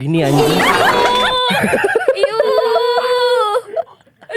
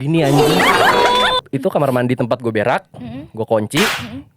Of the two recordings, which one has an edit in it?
second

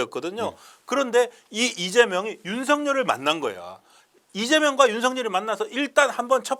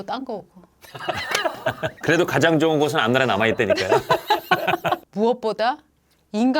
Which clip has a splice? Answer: second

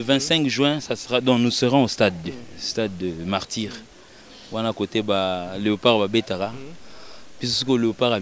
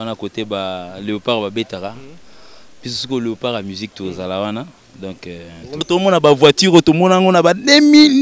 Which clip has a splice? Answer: second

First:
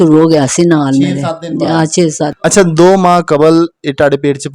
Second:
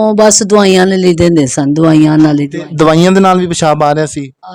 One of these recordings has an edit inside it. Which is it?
first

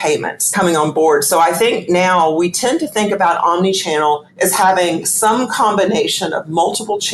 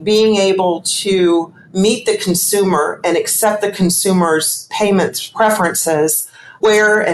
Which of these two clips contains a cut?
second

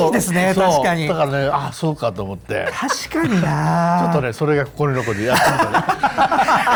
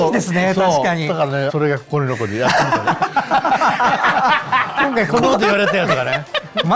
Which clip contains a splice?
second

